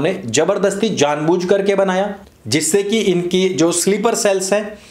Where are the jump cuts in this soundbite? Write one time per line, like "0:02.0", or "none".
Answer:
none